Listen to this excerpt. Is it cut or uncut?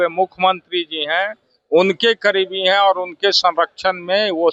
uncut